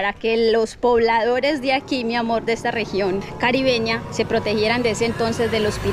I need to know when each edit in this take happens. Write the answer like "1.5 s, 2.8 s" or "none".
none